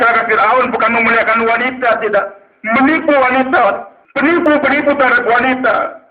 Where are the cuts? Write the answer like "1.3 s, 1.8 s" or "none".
4.4 s